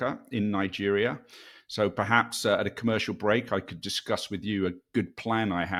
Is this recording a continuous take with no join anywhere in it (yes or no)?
yes